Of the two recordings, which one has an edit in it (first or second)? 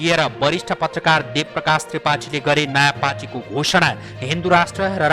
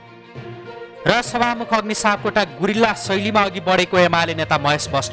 second